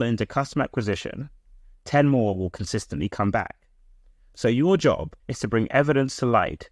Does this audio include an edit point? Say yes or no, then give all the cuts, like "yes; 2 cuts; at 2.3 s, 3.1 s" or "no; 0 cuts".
yes; 1 cut; at 5.1 s